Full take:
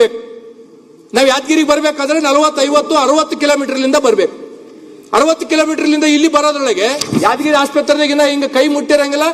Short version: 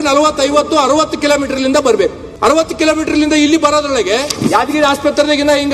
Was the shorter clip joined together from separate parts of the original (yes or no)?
yes